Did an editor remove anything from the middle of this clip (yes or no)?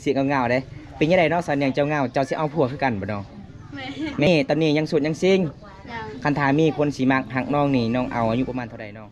yes